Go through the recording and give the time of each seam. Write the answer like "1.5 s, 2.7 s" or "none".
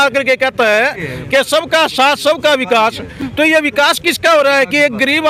none

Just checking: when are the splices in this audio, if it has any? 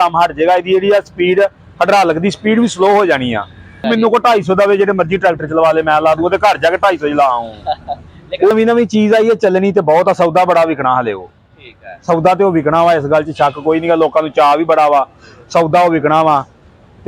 3.9 s, 8.5 s

